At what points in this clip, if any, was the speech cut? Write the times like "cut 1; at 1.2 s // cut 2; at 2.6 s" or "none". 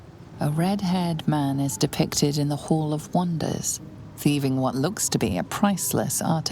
cut 1; at 4.7 s